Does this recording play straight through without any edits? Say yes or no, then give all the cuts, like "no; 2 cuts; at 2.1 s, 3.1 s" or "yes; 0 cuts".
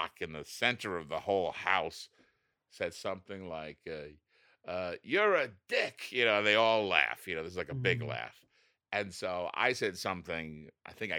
yes; 0 cuts